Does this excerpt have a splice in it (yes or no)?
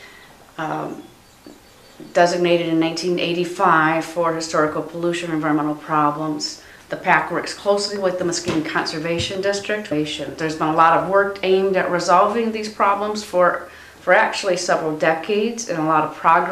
no